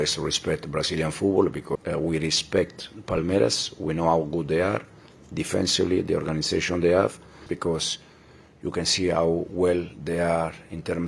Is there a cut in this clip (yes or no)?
yes